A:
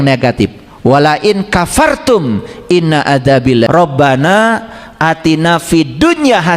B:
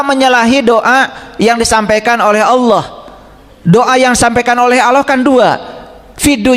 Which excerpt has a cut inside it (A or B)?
A